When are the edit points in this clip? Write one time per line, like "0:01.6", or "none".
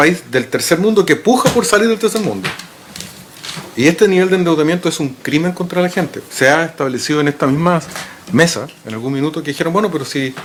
none